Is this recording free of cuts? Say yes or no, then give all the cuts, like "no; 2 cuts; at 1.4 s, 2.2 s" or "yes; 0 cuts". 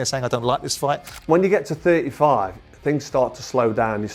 no; 1 cut; at 1.1 s